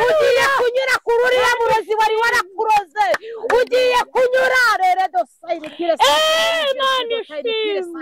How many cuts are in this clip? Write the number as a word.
zero